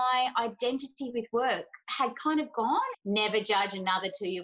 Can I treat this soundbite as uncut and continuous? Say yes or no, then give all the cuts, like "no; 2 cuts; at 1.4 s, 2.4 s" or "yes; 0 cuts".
no; 1 cut; at 2.9 s